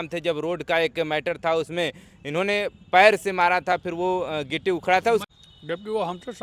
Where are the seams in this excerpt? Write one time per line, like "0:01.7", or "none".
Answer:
0:05.2